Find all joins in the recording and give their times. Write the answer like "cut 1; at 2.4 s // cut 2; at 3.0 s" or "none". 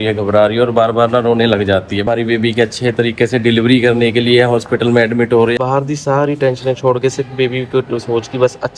cut 1; at 2.1 s // cut 2; at 5.5 s